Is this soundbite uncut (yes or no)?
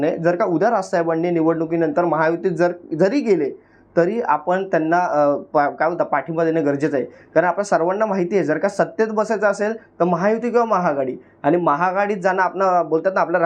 yes